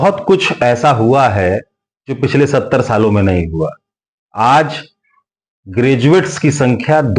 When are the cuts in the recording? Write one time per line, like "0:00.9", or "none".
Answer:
none